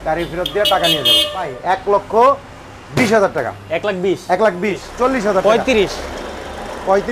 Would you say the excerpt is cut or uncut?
cut